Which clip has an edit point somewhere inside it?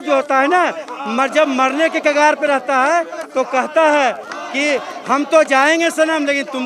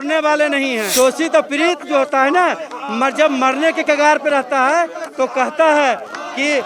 second; 1 cut; at 0.9 s

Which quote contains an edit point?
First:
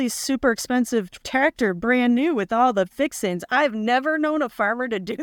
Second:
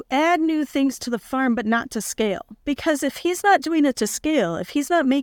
second; 1 cut; at 2.5 s

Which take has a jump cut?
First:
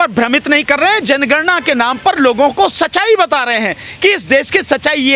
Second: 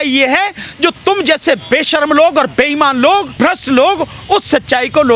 second; 1 cut; at 3.3 s

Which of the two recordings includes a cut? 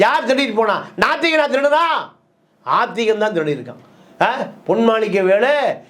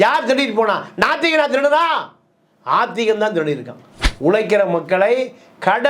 second; 1 cut; at 4.0 s

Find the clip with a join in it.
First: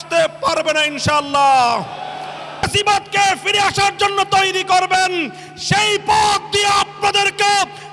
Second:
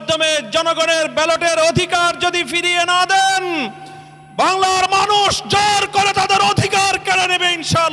first; 1 cut; at 2.7 s

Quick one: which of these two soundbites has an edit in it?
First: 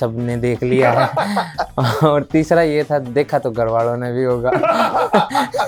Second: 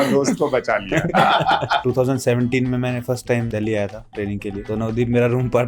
second; 3 cuts; at 1.8 s, 3.5 s, 4.6 s

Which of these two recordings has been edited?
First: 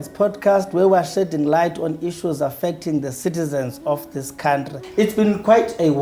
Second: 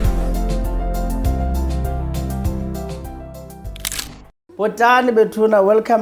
first; 1 cut; at 4.8 s

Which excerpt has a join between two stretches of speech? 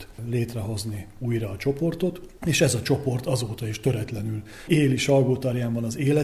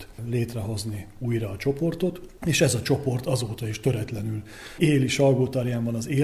first; 1 cut; at 4.5 s

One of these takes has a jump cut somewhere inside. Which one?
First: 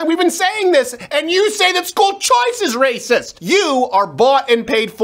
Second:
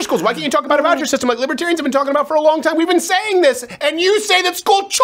first; 1 cut; at 3.3 s

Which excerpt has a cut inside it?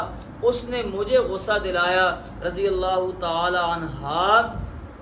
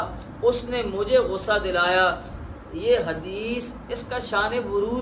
second; 1 cut; at 2.3 s

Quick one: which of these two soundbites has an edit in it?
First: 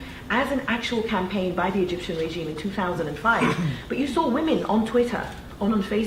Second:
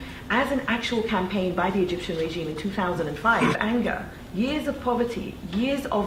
first; 1 cut; at 3.6 s

